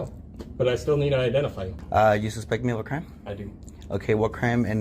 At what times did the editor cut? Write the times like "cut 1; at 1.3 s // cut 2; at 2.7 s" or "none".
cut 1; at 1.8 s

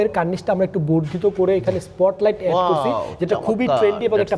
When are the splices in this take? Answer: none

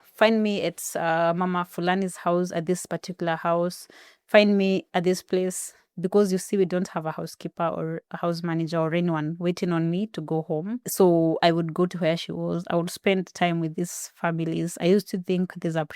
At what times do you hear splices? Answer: cut 1; at 10.9 s

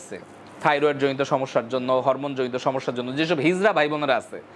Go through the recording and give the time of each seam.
none

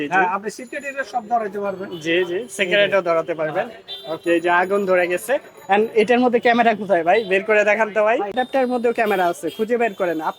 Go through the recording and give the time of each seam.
cut 1; at 8.3 s

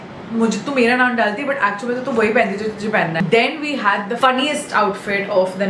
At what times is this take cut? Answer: cut 1; at 3.2 s // cut 2; at 4.2 s

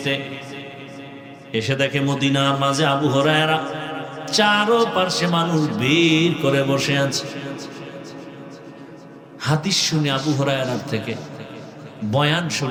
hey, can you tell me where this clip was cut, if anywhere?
none

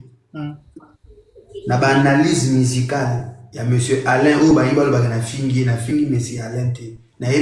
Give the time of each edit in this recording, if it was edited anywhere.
none

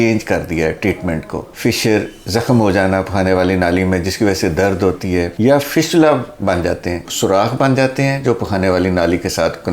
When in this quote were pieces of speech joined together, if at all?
cut 1; at 1.4 s // cut 2; at 7.0 s

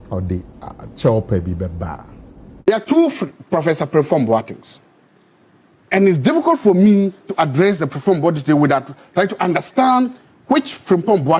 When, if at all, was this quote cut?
cut 1; at 2.7 s

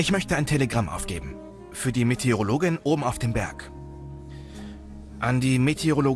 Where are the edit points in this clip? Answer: cut 1; at 3.5 s // cut 2; at 5.2 s

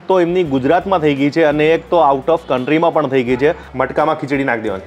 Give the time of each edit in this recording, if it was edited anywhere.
cut 1; at 3.7 s

